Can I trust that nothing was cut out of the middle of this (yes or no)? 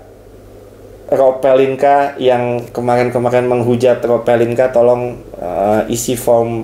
yes